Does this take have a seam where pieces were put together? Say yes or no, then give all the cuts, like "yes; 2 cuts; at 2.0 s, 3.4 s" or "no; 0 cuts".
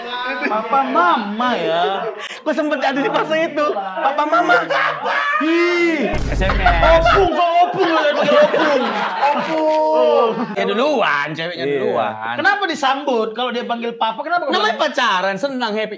yes; 2 cuts; at 6.2 s, 10.6 s